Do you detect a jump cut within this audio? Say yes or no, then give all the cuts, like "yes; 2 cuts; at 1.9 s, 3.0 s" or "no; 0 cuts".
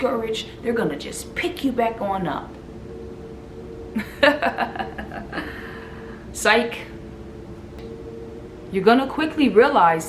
yes; 1 cut; at 7.8 s